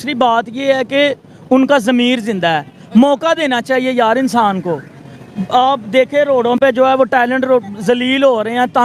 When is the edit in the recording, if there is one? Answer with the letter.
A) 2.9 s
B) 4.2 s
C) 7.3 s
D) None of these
D